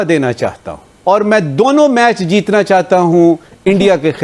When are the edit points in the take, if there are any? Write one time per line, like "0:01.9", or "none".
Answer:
0:00.9